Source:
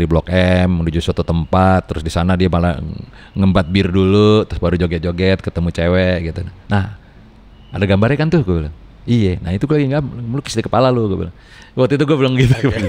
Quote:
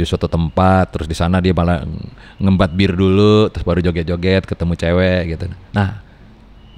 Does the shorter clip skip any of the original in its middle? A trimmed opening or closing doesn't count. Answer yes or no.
no